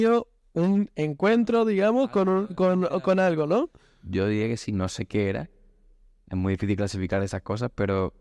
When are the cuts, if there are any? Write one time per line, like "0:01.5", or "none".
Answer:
none